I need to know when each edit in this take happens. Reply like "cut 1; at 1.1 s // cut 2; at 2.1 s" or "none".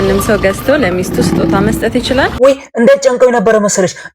cut 1; at 2.3 s